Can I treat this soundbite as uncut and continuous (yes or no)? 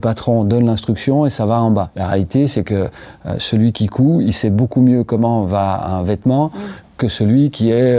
yes